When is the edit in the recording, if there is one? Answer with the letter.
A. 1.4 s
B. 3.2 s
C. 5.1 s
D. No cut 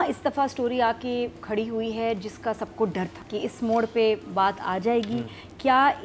B